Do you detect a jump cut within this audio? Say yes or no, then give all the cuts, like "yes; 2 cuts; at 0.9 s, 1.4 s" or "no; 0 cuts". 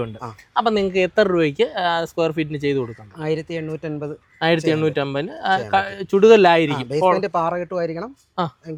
no; 0 cuts